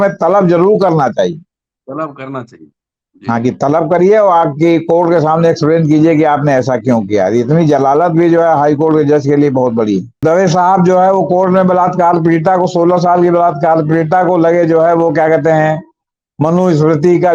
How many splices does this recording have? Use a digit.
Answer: 1